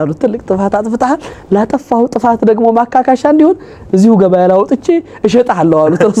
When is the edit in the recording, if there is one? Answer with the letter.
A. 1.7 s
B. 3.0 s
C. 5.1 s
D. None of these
D